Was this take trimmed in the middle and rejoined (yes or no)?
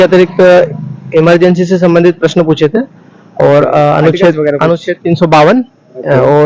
no